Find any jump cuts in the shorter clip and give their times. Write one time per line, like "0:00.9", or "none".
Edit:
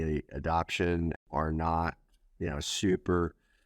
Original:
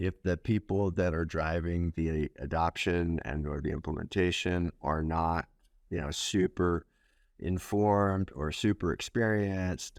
0:01.2